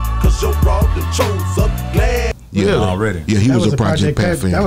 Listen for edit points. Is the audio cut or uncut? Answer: uncut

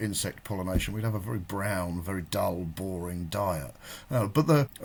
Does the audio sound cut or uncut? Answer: uncut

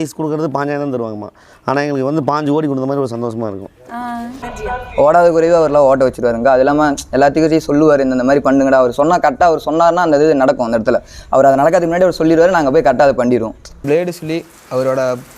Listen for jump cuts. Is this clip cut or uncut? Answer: cut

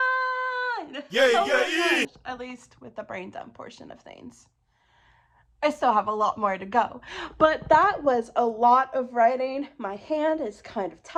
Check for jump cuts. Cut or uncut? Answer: uncut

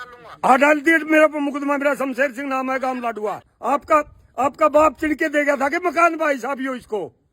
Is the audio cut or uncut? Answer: cut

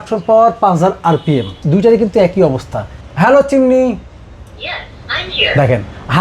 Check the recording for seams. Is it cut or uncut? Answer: cut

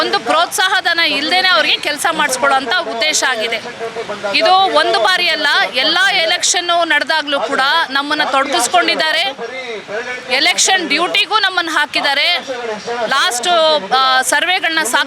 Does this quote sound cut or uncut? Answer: uncut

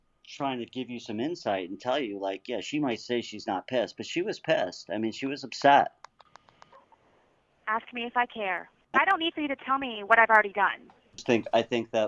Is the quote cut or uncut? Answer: cut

